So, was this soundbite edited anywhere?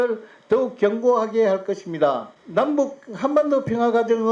yes; 1 cut; at 2.3 s

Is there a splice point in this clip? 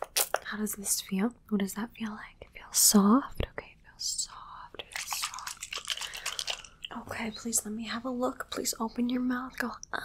yes; 1 cut; at 6.7 s

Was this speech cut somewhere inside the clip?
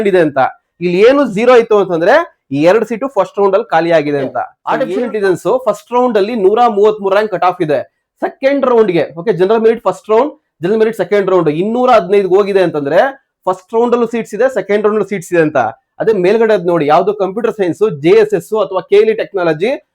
yes; 1 cut; at 4.5 s

